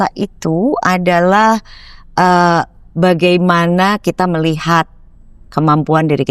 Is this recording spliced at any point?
no; 0 cuts

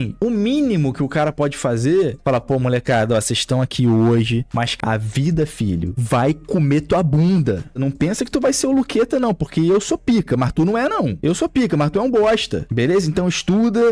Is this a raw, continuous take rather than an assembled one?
no; 3 cuts; at 2.1 s, 4.7 s, 7.8 s

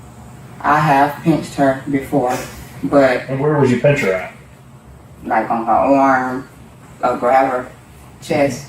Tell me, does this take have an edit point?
yes; 2 cuts; at 3.3 s, 6.7 s

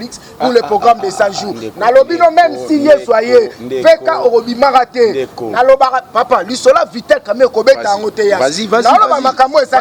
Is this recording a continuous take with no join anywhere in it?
yes; 0 cuts

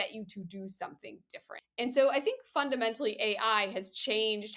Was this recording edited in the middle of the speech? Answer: yes; 1 cut; at 1.6 s

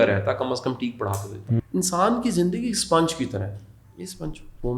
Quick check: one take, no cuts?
no; 1 cut; at 1.5 s

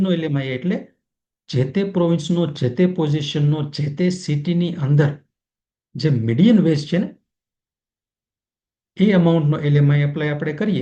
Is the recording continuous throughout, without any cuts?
yes; 0 cuts

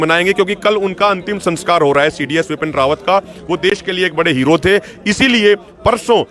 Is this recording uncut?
yes; 0 cuts

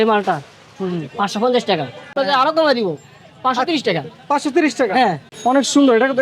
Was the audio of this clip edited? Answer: yes; 2 cuts; at 2.1 s, 5.3 s

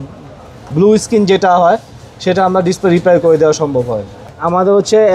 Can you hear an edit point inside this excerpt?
yes; 1 cut; at 4.2 s

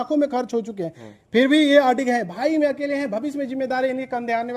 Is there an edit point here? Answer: no; 0 cuts

